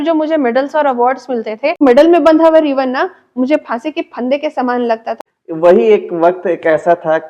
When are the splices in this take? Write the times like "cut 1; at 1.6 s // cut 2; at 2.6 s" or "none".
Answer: cut 1; at 1.8 s // cut 2; at 5.2 s